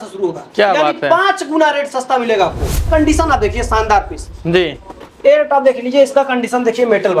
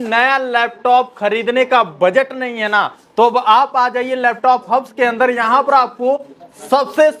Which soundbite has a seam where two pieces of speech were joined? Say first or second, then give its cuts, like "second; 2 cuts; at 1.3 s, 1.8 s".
first; 1 cut; at 2.9 s